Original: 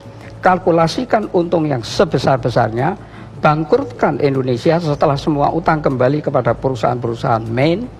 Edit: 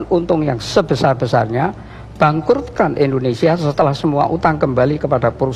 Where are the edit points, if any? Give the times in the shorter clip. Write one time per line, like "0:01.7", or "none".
none